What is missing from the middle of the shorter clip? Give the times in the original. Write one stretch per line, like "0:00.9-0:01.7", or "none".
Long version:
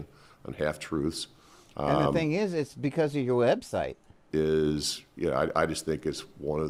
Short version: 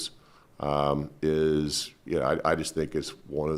0:02.2-0:04.1